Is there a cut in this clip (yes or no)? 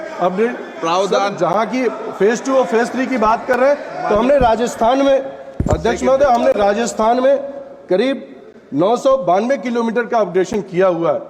no